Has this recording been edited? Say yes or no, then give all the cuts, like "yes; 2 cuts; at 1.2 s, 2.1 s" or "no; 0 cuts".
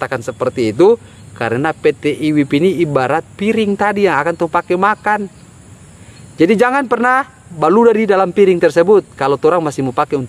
no; 0 cuts